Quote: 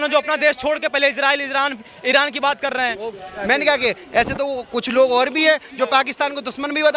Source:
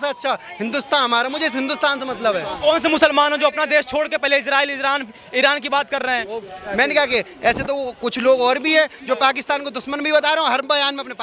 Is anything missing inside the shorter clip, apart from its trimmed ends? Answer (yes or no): no